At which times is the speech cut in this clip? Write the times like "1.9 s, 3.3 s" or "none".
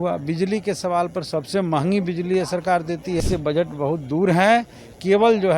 3.2 s